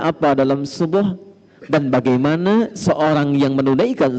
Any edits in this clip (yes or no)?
no